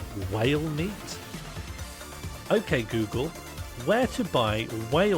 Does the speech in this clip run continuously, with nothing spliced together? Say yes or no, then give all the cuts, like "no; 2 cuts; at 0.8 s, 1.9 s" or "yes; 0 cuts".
yes; 0 cuts